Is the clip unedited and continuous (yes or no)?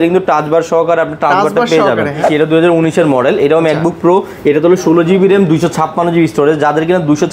no